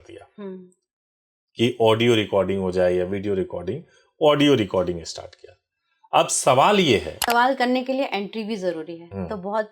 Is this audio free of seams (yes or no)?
no